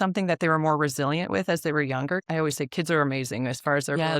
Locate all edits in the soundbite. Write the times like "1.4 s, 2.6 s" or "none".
2.2 s